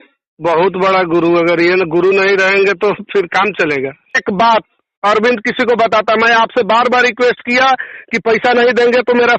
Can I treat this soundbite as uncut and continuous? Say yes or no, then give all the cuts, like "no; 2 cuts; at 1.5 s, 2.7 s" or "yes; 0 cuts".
no; 1 cut; at 4.2 s